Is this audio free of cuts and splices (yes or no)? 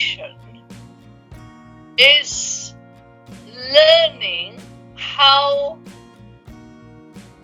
yes